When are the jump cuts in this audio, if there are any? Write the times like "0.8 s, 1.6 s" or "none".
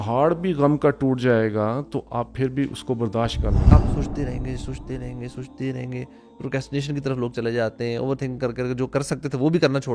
3.7 s